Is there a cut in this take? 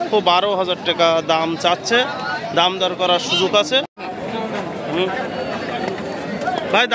yes; 1 cut; at 3.8 s

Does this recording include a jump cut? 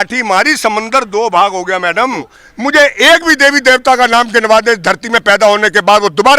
yes; 1 cut; at 2.4 s

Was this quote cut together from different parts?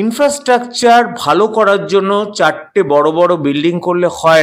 no; 0 cuts

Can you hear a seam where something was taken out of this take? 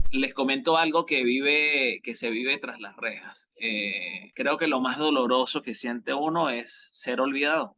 no; 0 cuts

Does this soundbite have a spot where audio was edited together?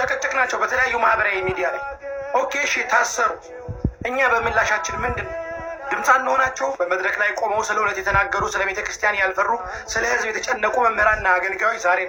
no; 0 cuts

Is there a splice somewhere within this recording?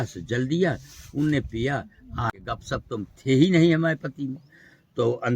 yes; 1 cut; at 2.3 s

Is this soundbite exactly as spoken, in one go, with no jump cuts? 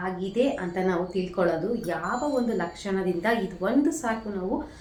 yes; 0 cuts

